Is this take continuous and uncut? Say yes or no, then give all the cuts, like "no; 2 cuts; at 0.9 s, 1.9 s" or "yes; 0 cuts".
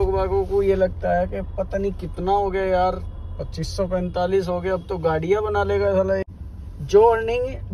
no; 1 cut; at 6.3 s